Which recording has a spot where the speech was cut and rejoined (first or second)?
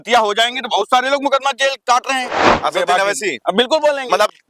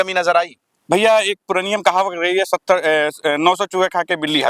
first